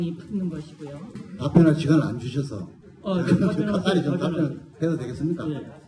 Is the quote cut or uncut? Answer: cut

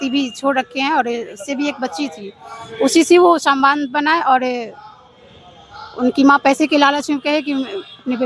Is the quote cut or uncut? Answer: uncut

